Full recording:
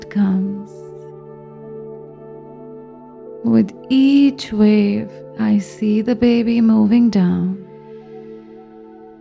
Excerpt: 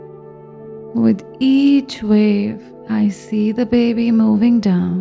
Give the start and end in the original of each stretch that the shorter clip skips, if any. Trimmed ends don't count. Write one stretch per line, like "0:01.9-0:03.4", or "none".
0:02.0-0:03.4